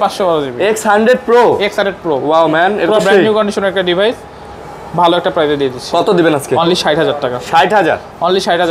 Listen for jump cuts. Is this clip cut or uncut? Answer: uncut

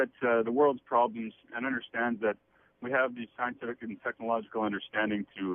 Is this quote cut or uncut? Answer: uncut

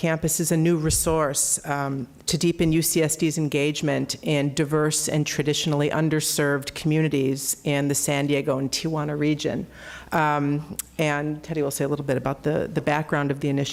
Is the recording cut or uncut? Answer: uncut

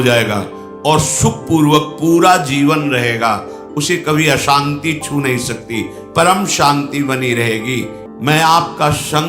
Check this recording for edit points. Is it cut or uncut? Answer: cut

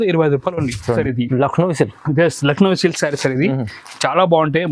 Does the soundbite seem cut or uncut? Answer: cut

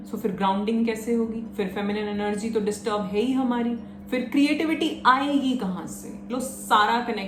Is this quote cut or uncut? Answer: uncut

